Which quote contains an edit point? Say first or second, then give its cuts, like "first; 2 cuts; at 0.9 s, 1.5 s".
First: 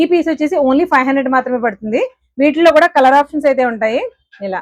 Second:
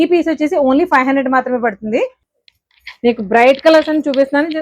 second; 1 cut; at 2.2 s